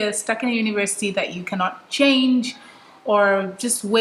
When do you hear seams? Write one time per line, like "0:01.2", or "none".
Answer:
none